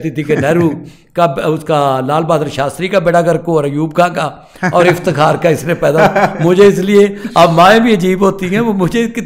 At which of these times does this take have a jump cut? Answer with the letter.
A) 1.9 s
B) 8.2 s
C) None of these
C